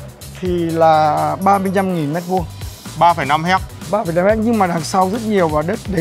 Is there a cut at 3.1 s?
no; 0 cuts

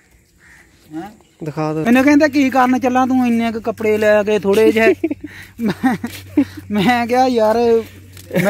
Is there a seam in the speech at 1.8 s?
yes; 1 cut; at 1.8 s

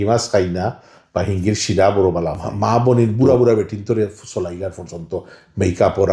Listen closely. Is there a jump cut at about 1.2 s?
no; 1 cut; at 2.4 s

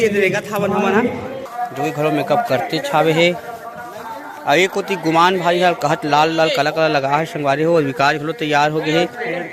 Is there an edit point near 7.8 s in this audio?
no; 1 cut; at 1.4 s

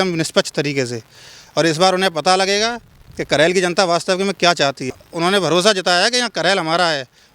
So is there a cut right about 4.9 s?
yes; 1 cut; at 4.9 s

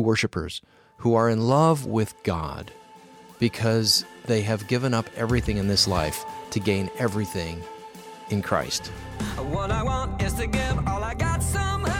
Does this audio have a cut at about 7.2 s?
no; 1 cut; at 9.0 s

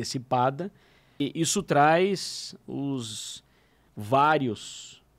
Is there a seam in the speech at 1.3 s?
yes; 1 cut; at 1.3 s

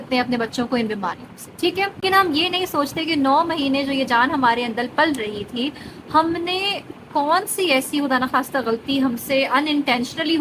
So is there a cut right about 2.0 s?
yes; 1 cut; at 2.0 s

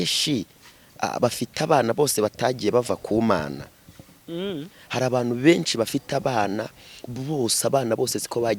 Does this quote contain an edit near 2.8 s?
no; 0 cuts

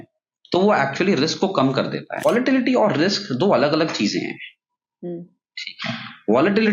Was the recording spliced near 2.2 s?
yes; 1 cut; at 2.2 s

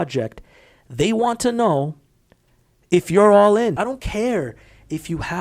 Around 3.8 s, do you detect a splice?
yes; 1 cut; at 3.8 s

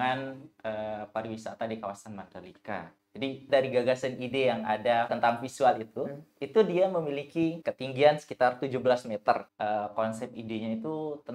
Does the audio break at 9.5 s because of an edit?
yes; 4 cuts; at 3.5 s, 5.1 s, 7.7 s, 9.5 s

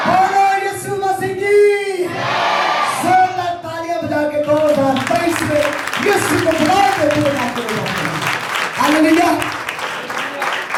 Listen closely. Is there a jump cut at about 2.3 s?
no; 0 cuts

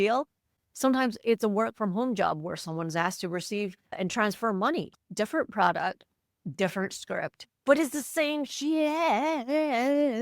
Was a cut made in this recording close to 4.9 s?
yes; 1 cut; at 4.9 s

